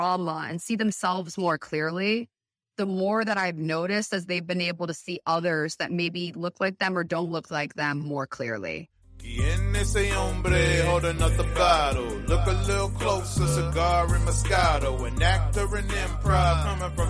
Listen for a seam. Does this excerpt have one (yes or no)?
yes